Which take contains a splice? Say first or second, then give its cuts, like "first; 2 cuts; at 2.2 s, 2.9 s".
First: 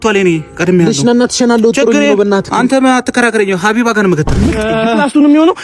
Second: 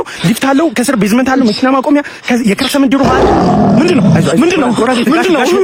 first; 1 cut; at 4.4 s